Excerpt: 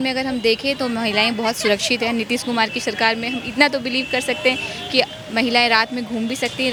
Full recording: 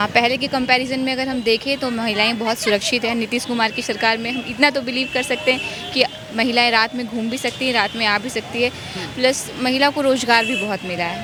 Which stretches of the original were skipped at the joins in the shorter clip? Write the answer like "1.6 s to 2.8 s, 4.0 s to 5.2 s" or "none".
none